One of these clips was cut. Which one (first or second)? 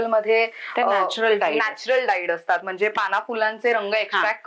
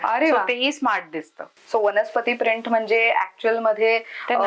second